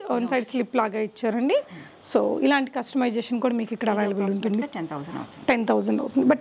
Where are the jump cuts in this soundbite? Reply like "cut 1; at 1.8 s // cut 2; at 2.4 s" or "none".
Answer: none